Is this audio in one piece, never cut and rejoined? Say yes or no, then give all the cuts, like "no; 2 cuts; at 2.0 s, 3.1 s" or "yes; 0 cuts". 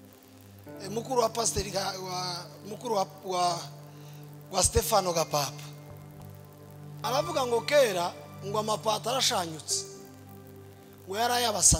no; 1 cut; at 7.0 s